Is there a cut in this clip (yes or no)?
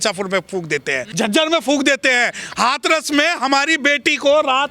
yes